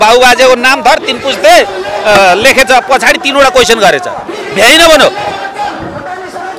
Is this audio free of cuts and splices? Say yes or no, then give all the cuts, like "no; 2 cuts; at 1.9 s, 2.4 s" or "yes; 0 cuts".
yes; 0 cuts